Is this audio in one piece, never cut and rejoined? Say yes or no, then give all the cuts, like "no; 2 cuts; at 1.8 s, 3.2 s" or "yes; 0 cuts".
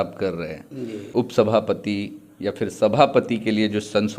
no; 1 cut; at 1.1 s